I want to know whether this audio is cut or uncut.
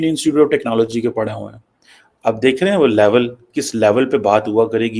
uncut